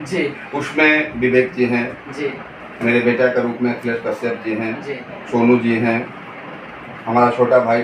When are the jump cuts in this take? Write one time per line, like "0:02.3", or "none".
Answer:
none